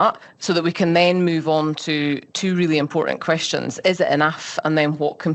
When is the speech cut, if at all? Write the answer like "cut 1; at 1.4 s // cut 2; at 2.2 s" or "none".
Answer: none